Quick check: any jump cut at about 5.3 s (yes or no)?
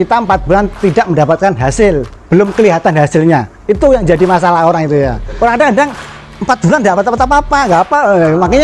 yes